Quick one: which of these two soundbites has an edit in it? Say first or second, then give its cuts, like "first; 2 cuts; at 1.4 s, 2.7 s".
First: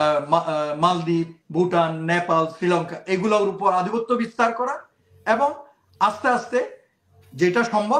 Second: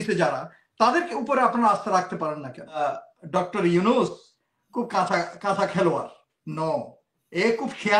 second; 1 cut; at 2.8 s